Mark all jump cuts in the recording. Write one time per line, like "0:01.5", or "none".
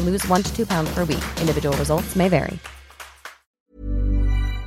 0:03.6